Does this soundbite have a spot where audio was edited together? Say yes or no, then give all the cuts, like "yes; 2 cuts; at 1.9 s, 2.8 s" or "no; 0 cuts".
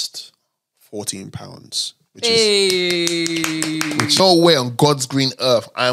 yes; 1 cut; at 4.2 s